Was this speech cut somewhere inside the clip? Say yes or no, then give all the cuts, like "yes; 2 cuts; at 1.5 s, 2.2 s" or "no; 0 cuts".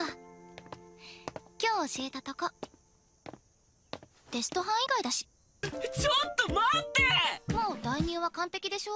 yes; 1 cut; at 4.5 s